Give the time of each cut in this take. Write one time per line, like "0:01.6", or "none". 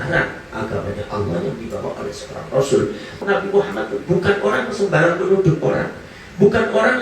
0:03.2